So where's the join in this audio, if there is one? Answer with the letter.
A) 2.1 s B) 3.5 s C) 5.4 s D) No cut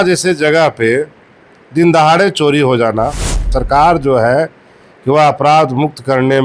B